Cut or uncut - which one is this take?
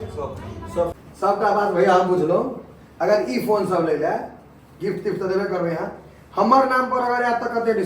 cut